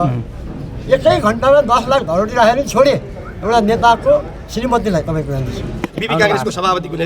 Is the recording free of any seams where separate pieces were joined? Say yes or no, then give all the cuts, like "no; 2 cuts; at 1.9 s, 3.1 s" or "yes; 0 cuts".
no; 1 cut; at 5.8 s